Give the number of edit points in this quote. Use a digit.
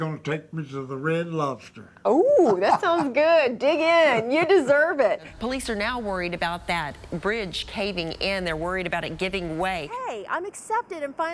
2